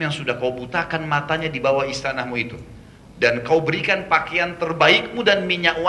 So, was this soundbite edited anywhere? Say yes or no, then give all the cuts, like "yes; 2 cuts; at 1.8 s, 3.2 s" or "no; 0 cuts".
no; 0 cuts